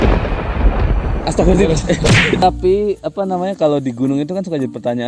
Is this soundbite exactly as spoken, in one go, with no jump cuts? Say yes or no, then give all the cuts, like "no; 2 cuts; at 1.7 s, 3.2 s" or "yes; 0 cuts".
no; 1 cut; at 2.4 s